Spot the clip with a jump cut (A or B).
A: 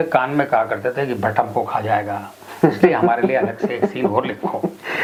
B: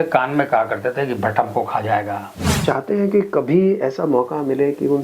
B